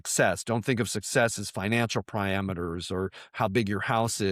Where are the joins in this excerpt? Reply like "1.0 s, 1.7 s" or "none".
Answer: none

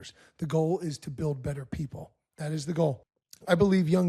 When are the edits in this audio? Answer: 3.1 s

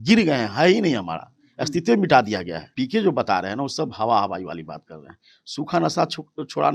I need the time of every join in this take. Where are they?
2.6 s

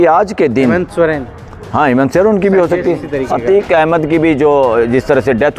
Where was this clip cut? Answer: 3.1 s

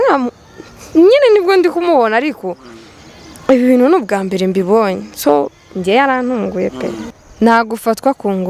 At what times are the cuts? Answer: 7.1 s

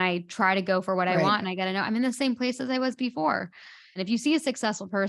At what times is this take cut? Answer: 3.9 s

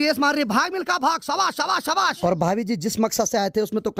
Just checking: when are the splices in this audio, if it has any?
2.1 s

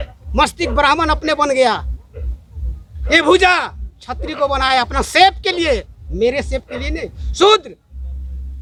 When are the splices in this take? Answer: none

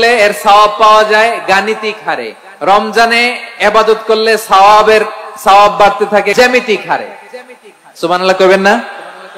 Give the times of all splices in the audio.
6.3 s

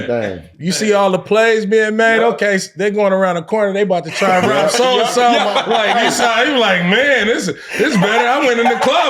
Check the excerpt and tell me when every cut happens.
none

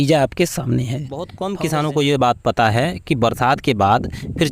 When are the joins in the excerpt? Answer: 1.4 s

